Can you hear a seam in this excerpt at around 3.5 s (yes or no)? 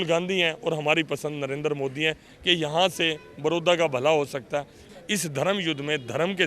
no